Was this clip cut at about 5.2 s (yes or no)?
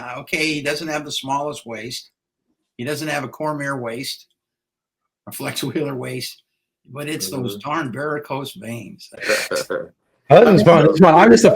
no